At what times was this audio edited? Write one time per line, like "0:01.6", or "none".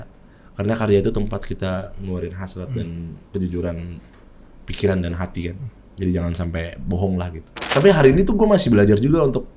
0:07.7